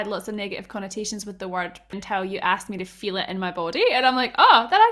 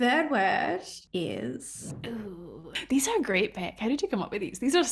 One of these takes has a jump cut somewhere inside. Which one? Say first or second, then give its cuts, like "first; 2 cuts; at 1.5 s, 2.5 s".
second; 2 cuts; at 1.0 s, 1.9 s